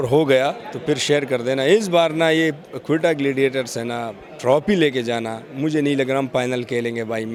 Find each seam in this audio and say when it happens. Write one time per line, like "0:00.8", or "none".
none